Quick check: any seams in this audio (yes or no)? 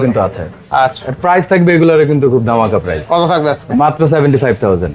no